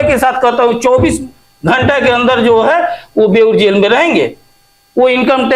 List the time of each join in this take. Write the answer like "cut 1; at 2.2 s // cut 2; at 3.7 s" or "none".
none